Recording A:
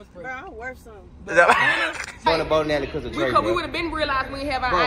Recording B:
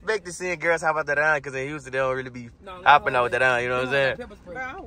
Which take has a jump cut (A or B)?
A